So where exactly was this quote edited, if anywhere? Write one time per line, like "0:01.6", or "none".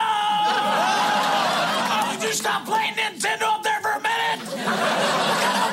0:01.8